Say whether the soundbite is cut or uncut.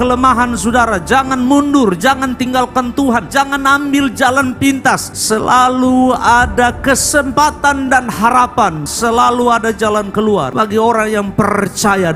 cut